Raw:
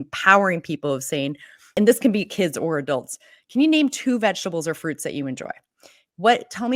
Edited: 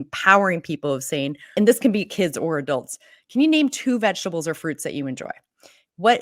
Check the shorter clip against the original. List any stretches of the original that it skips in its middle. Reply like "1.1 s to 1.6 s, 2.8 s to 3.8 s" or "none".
1.4 s to 1.6 s